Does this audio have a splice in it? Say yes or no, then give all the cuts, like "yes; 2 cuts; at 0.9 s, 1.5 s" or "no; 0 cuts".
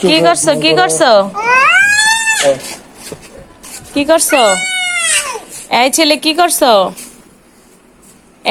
no; 0 cuts